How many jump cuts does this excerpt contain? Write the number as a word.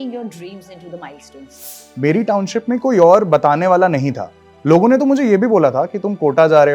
one